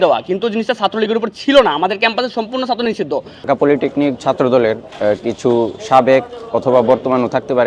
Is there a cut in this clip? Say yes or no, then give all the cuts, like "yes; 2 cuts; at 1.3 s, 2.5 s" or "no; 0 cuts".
yes; 2 cuts; at 3.3 s, 4.9 s